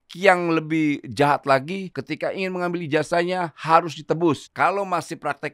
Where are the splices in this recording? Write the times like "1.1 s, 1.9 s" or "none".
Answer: 1.9 s, 4.4 s